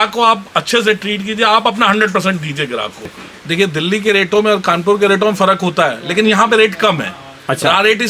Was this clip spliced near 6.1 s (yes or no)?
no